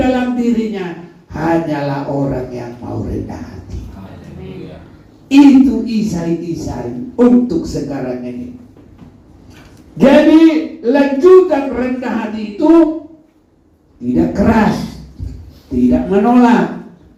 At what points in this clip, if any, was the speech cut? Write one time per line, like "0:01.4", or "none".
none